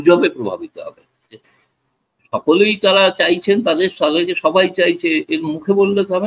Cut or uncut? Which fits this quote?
cut